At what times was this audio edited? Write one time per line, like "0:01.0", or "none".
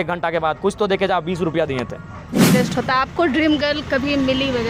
0:02.5

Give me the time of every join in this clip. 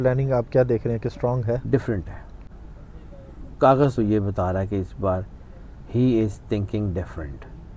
none

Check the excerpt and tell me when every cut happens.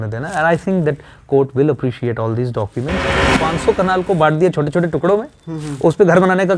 0:03.2

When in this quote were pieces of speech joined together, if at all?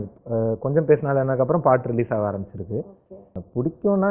0:02.9

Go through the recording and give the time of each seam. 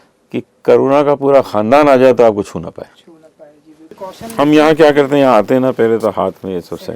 0:03.9

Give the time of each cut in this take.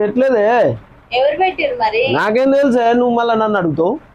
none

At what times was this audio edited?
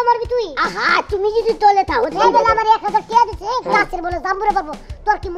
0:02.1

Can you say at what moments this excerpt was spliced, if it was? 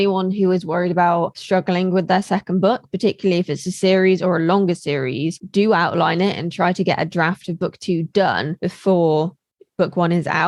0:01.4
0:05.4

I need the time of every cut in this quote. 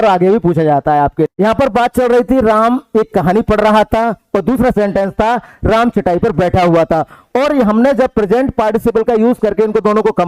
0:01.3

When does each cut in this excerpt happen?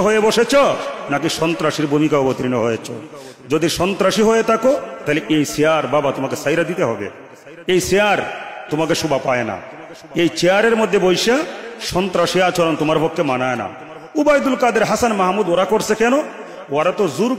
none

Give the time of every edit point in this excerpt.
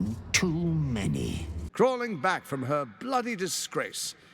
0:01.7

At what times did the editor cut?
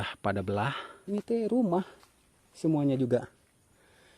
0:00.9

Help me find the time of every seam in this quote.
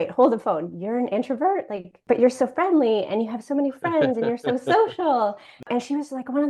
0:02.0
0:05.7

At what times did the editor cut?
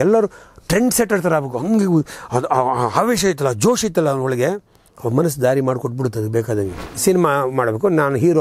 0:07.0

